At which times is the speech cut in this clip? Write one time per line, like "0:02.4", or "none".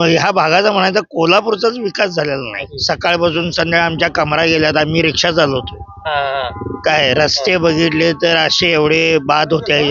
0:02.6